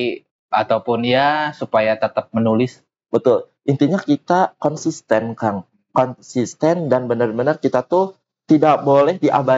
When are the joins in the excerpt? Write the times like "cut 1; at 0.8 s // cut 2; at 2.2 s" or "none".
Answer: none

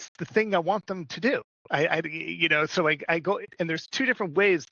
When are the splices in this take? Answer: cut 1; at 3.5 s

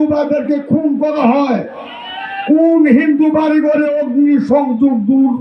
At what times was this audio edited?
none

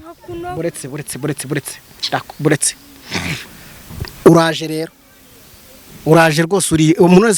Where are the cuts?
none

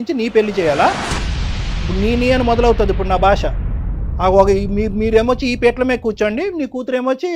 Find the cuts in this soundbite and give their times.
none

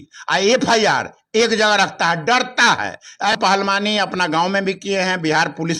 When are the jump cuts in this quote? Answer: cut 1; at 3.4 s

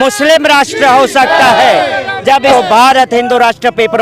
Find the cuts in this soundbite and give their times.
cut 1; at 2.5 s

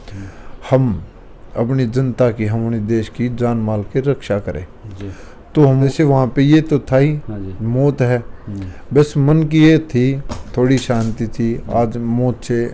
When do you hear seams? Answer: cut 1; at 5.8 s

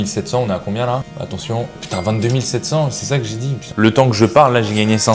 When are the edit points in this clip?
cut 1; at 1.1 s // cut 2; at 3.7 s

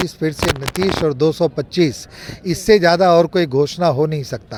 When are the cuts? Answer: none

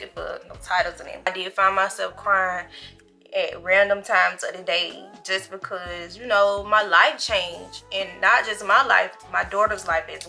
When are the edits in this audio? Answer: cut 1; at 1.3 s

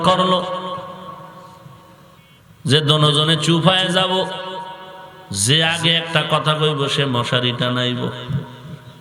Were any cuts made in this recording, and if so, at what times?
cut 1; at 2.2 s

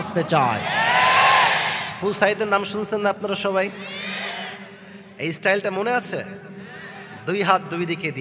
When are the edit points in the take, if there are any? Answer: cut 1; at 2.0 s

